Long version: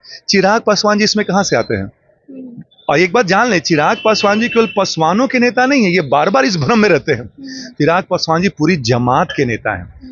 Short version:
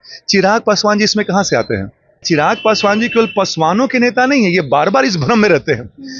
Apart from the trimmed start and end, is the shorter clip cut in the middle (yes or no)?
yes